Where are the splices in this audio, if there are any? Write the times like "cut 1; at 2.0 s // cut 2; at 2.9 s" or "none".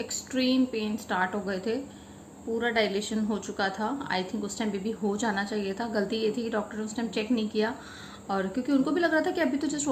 none